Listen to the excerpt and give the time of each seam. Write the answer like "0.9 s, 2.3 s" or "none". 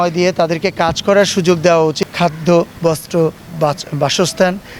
2.0 s